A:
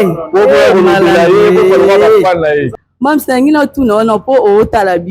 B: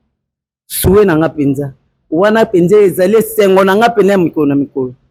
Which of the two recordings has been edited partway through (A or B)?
A